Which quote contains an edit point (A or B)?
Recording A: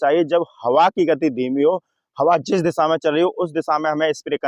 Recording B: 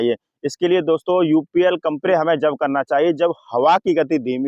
B